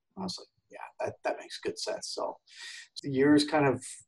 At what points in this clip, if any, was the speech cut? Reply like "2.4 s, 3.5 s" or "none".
2.9 s